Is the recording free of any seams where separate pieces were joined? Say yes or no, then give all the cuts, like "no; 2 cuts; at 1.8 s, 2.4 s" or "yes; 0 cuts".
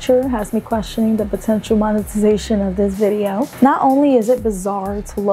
yes; 0 cuts